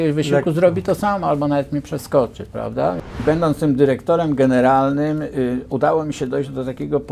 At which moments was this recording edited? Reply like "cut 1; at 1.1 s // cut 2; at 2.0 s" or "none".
cut 1; at 3.1 s